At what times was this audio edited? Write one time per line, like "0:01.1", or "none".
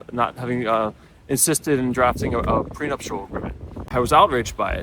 0:03.9